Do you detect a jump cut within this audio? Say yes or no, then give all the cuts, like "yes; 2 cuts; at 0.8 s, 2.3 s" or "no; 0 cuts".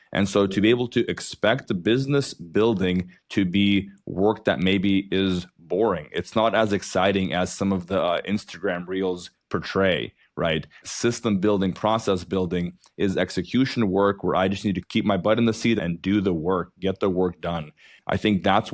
yes; 1 cut; at 15.8 s